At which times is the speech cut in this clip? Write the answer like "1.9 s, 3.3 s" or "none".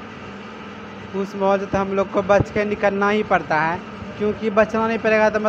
none